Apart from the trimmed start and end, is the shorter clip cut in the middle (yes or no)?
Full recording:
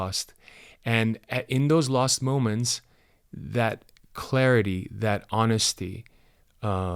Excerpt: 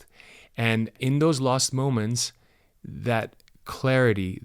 yes